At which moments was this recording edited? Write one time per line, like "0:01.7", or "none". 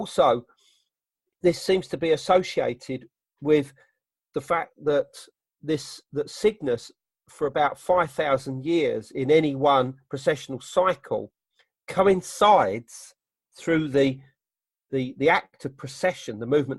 0:01.1

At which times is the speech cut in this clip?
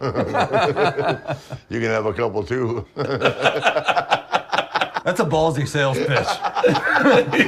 0:04.9

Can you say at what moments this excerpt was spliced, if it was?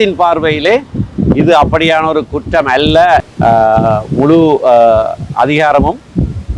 0:03.3

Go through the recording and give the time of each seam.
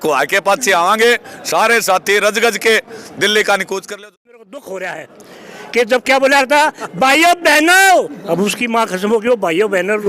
0:03.8

